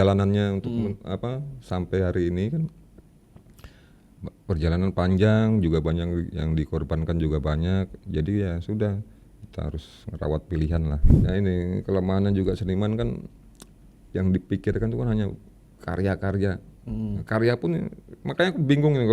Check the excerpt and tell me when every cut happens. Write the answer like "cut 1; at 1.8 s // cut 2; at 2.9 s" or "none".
cut 1; at 11.1 s